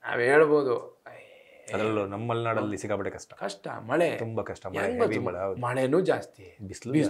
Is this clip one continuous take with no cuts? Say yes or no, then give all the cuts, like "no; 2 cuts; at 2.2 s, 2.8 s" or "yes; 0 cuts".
yes; 0 cuts